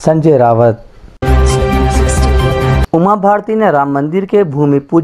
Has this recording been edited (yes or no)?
yes